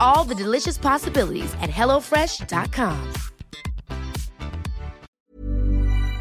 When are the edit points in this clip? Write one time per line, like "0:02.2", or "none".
0:05.0